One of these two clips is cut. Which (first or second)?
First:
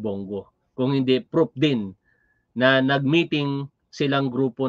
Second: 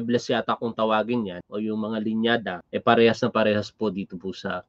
second